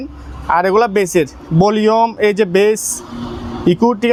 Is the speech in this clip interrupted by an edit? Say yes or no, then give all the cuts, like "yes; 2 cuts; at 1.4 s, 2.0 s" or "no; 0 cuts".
no; 0 cuts